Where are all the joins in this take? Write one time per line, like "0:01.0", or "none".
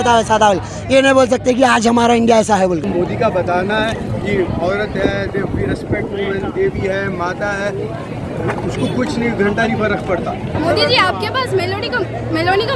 0:02.9
0:10.5